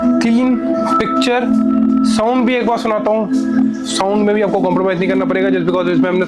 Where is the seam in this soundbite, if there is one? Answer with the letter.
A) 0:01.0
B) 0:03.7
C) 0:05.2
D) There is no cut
D